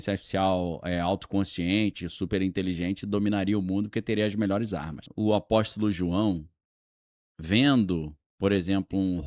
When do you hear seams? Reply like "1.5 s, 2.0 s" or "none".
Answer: 5.0 s